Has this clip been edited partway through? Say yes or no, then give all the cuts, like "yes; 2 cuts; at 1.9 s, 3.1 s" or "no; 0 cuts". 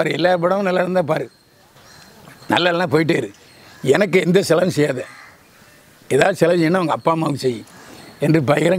no; 0 cuts